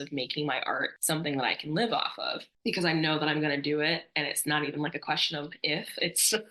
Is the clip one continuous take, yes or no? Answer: yes